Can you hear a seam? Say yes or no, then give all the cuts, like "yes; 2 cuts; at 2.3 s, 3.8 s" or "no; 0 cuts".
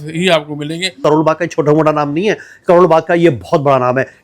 yes; 1 cut; at 0.9 s